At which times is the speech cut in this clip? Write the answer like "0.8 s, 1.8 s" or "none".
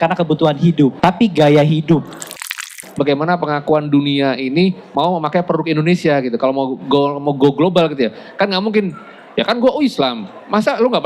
1.0 s, 2.5 s